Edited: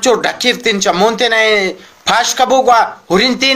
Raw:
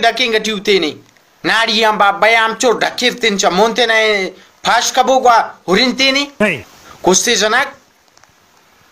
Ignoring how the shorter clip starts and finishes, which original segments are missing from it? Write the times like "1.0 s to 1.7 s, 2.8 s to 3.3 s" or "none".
none

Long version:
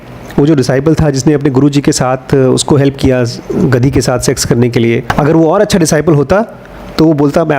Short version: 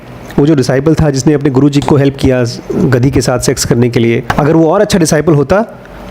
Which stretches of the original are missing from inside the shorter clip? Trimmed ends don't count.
1.8 s to 2.6 s

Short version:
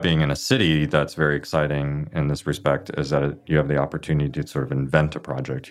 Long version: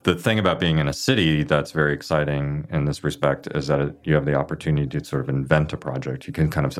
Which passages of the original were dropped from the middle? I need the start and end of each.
none

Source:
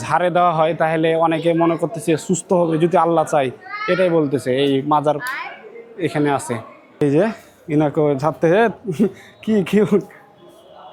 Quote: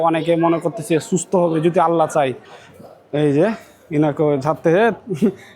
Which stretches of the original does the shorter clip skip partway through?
3.8 s to 6.4 s

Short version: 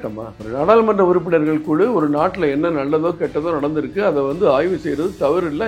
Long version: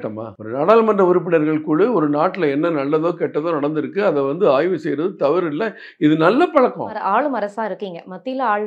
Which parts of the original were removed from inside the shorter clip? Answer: none

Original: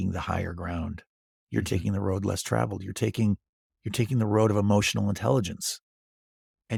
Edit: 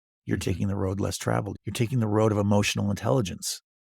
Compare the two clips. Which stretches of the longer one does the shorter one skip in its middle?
2.8 s to 3.8 s

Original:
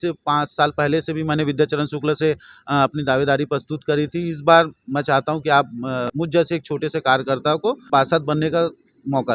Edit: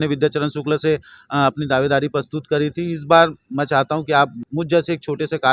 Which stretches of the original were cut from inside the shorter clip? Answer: 5.8 s to 6.1 s

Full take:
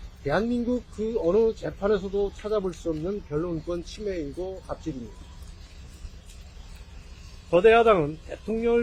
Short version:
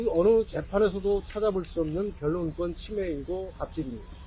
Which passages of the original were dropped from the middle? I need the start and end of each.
none

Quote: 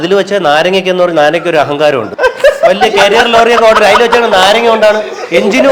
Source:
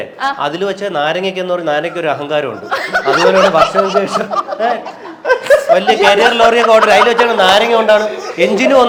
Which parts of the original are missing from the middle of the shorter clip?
2.6 s to 5.2 s

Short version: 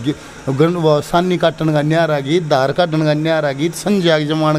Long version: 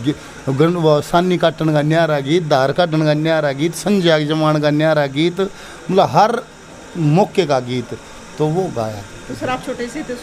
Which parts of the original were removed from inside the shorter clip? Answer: none

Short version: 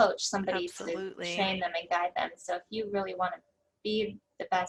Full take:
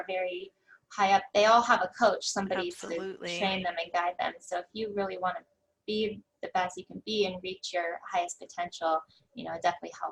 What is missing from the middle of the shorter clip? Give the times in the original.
none

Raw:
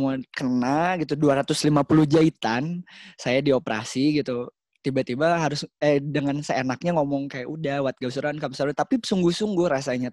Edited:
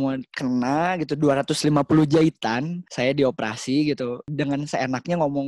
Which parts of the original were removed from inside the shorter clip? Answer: 2.8 s to 3.1 s, 4.6 s to 6.1 s

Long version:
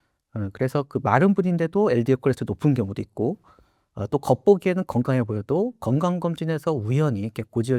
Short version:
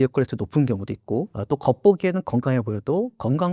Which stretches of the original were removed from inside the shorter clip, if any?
3.4 s to 4.0 s

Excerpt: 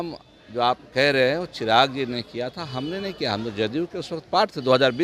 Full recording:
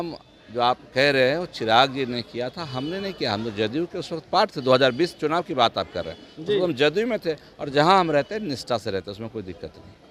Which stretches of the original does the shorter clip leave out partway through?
none

